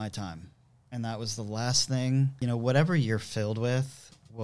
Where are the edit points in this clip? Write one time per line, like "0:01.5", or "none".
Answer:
0:02.3